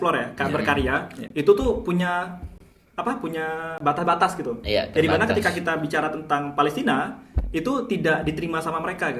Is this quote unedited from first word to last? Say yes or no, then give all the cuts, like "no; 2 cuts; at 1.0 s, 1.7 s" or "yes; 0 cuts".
yes; 0 cuts